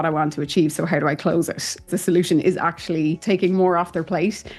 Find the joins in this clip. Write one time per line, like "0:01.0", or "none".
0:01.9
0:03.2